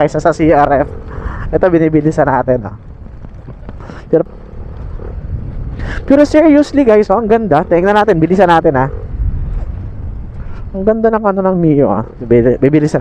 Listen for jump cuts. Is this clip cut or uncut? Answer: cut